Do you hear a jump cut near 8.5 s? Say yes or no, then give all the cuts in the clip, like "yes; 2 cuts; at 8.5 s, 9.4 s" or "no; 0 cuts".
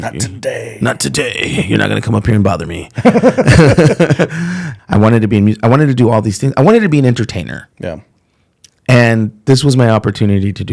no; 1 cut; at 4.7 s